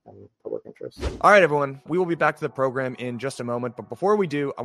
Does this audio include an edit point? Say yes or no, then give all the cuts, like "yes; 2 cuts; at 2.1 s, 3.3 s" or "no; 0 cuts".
yes; 1 cut; at 1.2 s